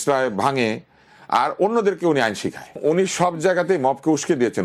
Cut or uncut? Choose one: cut